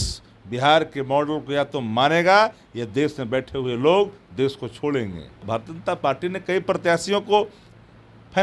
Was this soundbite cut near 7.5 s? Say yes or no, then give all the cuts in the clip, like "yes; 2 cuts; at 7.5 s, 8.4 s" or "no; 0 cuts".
no; 1 cut; at 5.4 s